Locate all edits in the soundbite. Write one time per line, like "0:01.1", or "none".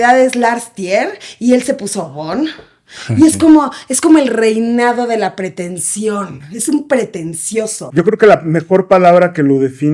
0:07.8